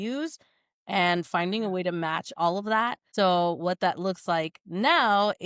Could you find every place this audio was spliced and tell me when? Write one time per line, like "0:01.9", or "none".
0:03.0